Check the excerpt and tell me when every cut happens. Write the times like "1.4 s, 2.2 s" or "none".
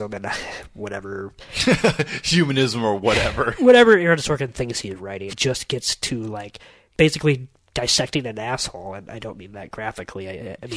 5.3 s, 6.7 s